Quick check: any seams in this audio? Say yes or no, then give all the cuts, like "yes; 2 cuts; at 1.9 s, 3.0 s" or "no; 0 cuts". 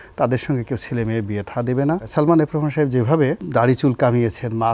yes; 2 cuts; at 2.1 s, 3.4 s